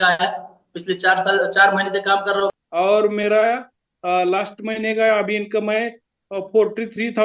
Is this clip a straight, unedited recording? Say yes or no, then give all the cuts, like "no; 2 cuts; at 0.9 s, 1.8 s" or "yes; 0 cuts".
no; 1 cut; at 2.5 s